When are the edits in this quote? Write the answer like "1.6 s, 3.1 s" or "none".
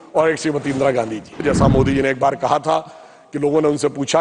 1.4 s